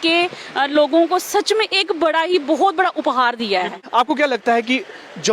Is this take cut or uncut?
cut